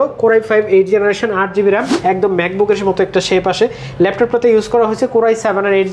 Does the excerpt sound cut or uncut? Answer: cut